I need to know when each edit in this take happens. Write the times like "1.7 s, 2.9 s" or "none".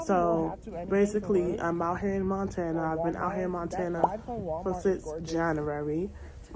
none